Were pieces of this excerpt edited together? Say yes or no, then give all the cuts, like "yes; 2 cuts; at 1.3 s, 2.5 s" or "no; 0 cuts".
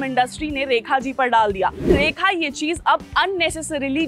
yes; 1 cut; at 1.9 s